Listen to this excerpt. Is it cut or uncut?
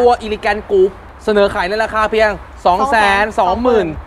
cut